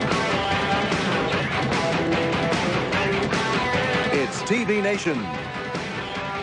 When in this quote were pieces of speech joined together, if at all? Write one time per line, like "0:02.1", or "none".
none